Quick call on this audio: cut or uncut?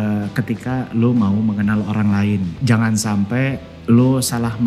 cut